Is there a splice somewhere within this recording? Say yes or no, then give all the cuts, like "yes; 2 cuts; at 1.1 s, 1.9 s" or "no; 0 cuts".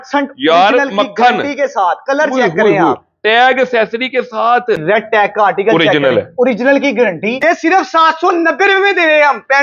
yes; 2 cuts; at 4.8 s, 7.3 s